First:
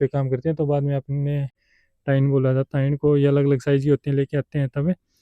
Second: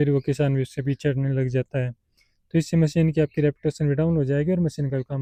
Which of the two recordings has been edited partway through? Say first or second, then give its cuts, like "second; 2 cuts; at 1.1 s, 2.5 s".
first; 1 cut; at 1.6 s